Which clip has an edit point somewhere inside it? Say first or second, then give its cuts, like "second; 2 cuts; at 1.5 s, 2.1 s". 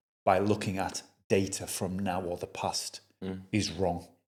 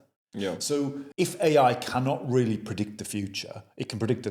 second; 1 cut; at 1.0 s